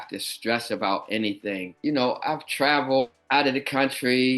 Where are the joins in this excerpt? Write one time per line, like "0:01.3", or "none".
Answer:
0:03.2